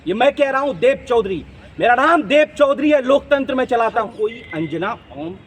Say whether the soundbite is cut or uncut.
cut